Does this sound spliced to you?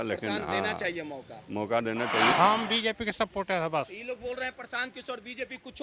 yes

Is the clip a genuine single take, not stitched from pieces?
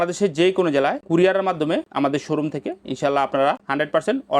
yes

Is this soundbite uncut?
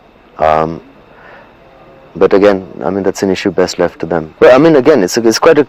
no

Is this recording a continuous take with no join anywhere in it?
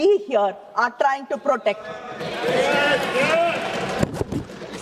yes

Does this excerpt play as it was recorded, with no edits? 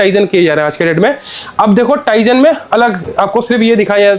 yes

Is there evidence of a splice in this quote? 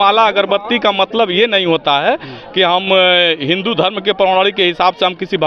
no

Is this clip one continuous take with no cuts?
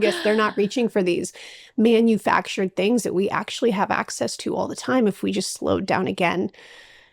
yes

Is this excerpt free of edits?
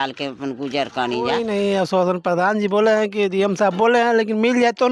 no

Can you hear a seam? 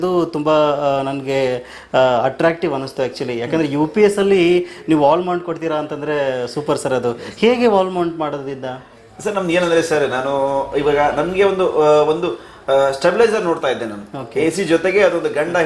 no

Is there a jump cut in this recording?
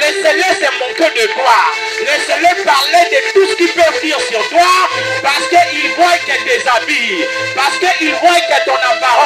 no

